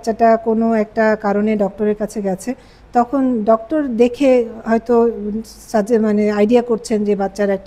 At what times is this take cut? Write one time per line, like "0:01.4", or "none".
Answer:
none